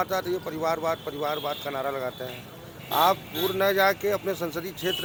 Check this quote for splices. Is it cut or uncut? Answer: uncut